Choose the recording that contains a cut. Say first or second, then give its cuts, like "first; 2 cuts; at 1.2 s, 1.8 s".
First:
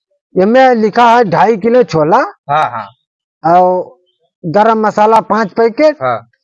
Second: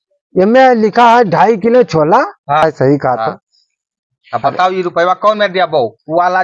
second; 1 cut; at 2.6 s